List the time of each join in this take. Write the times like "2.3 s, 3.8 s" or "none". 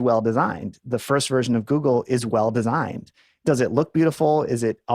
3.4 s